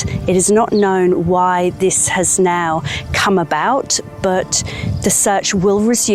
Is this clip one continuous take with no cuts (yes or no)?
yes